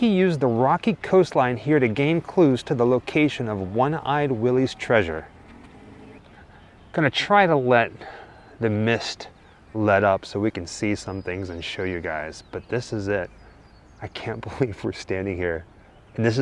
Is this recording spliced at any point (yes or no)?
yes